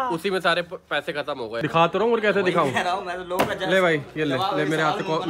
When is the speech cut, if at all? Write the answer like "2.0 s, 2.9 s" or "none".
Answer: 1.6 s

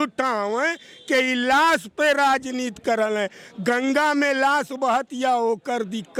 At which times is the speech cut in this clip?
none

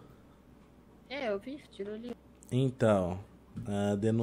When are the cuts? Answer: 2.3 s

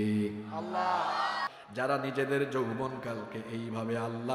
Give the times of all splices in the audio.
1.4 s

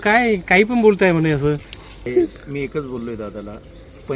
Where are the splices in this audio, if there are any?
2.1 s

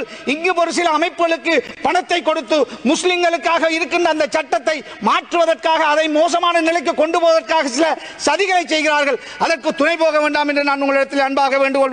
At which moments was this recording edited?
none

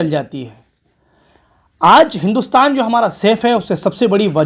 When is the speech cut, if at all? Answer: none

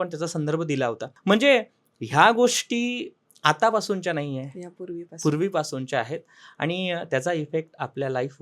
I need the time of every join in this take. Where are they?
1.1 s

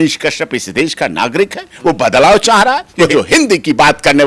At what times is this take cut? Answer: 3.1 s

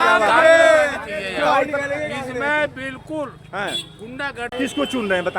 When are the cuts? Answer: 4.5 s

